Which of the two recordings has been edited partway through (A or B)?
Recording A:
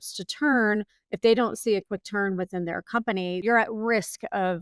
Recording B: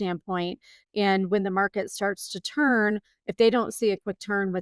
A